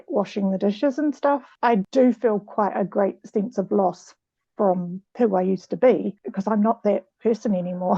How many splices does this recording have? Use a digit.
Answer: 3